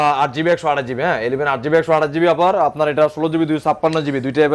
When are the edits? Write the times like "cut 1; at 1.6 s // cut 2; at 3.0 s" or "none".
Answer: none